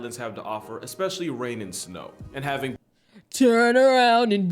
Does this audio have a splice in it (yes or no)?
yes